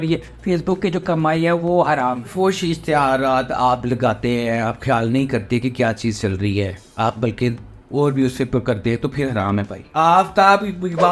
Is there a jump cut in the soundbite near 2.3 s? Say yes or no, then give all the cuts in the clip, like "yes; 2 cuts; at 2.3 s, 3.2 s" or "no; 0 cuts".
yes; 2 cuts; at 2.3 s, 9.8 s